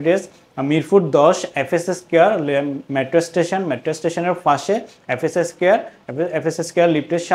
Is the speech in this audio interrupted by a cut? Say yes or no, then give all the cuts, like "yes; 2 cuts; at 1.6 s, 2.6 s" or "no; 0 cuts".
no; 0 cuts